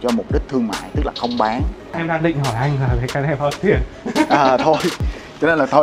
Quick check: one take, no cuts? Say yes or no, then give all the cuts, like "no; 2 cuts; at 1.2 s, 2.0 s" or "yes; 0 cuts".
no; 1 cut; at 2.0 s